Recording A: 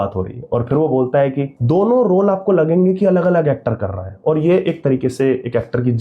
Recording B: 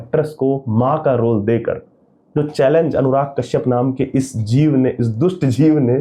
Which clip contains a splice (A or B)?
A